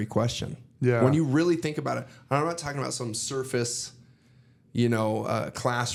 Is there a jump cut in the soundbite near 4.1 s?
no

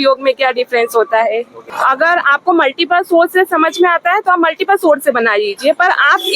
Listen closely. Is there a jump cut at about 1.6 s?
yes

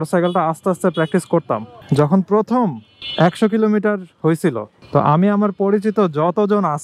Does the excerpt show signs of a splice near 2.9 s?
no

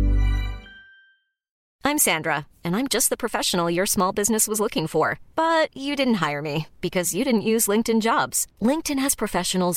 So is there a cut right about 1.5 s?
yes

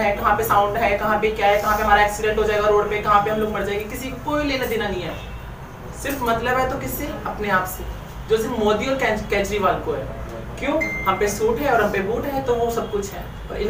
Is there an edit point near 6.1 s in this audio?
no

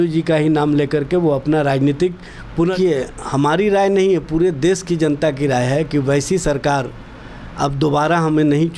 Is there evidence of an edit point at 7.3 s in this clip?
no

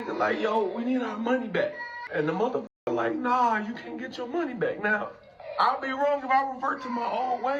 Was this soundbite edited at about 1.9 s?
yes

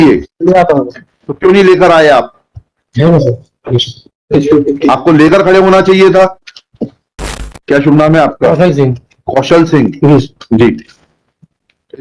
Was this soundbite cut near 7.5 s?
yes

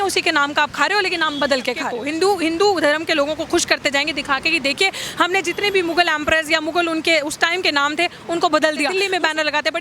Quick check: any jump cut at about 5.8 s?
no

